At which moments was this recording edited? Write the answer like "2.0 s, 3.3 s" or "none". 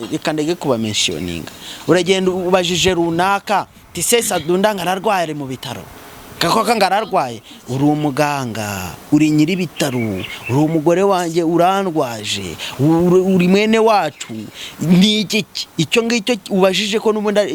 none